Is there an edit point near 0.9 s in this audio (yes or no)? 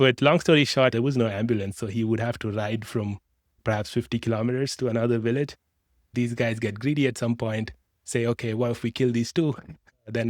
yes